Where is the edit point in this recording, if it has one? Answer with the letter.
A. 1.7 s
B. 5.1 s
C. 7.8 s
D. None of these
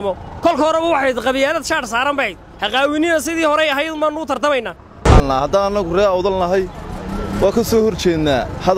B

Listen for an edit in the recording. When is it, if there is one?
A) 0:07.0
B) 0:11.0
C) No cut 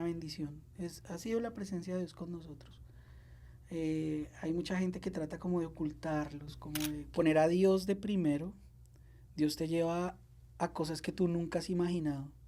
A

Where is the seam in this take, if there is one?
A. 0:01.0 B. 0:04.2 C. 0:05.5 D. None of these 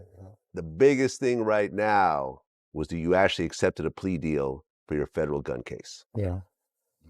A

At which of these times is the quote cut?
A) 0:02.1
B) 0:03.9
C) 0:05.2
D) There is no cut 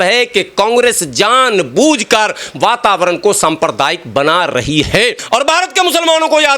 C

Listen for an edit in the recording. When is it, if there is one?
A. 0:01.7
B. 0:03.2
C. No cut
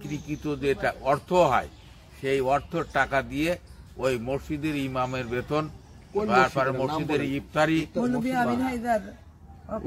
C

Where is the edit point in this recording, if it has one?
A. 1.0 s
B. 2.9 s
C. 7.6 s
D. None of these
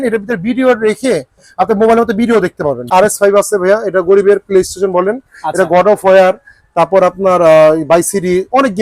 B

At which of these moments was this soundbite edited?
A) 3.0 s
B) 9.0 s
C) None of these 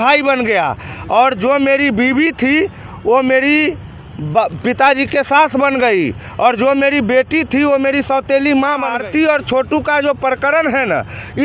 B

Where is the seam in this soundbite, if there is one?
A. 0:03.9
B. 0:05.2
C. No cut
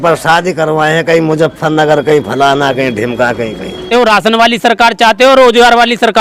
A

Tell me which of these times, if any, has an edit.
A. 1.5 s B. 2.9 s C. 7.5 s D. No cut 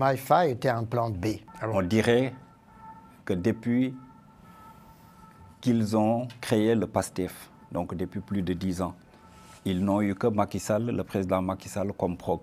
A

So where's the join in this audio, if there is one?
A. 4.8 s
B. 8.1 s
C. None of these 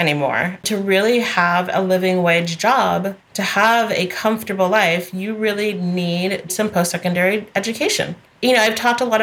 C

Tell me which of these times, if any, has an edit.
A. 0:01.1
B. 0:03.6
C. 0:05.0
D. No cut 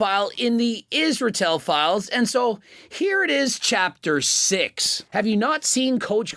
C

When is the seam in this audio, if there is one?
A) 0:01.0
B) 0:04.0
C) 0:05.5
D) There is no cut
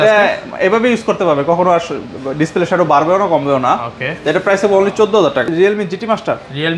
C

